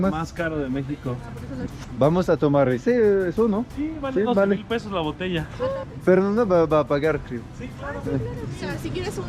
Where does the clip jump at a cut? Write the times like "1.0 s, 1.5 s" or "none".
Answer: 1.6 s